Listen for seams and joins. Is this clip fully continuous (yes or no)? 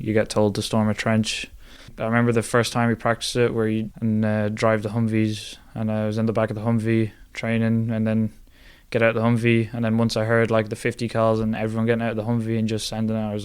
no